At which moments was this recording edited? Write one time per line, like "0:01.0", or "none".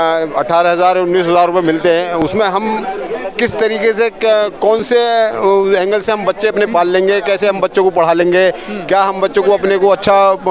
none